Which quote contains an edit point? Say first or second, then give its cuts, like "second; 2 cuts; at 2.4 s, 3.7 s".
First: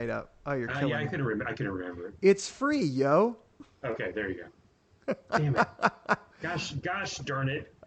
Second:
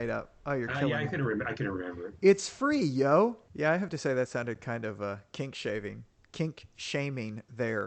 second; 1 cut; at 3.4 s